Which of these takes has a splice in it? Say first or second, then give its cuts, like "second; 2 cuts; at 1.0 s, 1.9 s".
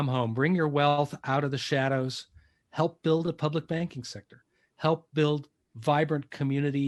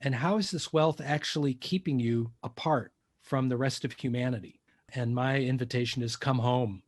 second; 2 cuts; at 2.6 s, 4.9 s